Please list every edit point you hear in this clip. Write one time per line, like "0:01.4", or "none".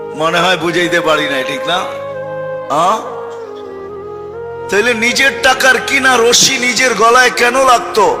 0:03.2
0:04.7